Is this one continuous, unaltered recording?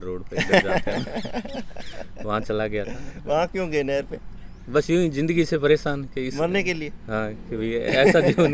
yes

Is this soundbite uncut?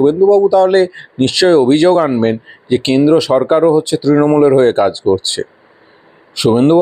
yes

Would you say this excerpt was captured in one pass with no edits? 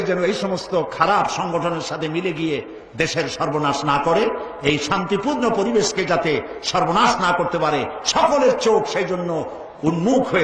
yes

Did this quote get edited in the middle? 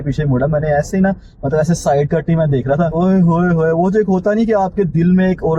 no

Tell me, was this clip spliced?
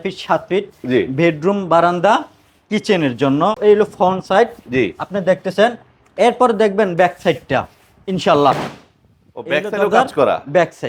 yes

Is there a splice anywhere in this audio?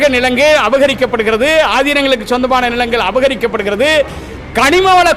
no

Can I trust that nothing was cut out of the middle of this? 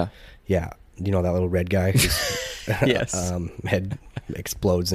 yes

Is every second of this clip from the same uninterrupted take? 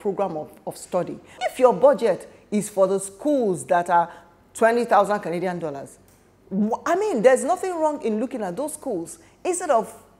no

